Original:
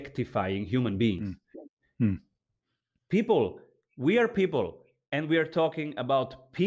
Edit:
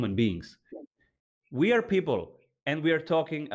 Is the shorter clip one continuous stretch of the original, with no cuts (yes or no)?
no